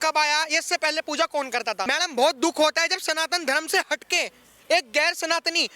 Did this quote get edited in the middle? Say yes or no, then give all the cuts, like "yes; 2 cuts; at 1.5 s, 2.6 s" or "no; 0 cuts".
yes; 1 cut; at 1.8 s